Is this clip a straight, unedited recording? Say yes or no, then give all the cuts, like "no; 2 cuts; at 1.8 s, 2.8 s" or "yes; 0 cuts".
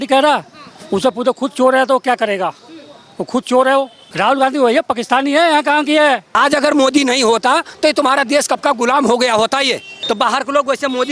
no; 3 cuts; at 4.0 s, 6.3 s, 9.9 s